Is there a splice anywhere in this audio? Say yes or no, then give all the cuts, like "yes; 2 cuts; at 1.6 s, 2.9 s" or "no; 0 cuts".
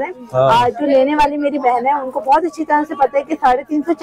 no; 0 cuts